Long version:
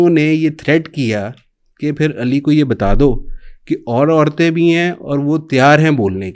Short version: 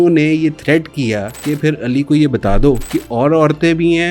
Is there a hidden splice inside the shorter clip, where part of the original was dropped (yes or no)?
yes